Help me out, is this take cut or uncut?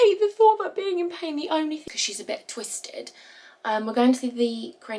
cut